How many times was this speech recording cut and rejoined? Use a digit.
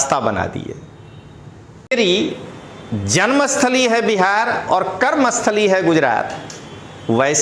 1